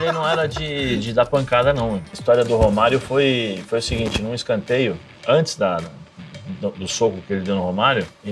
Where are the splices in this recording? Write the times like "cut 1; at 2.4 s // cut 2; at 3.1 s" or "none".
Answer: cut 1; at 2.0 s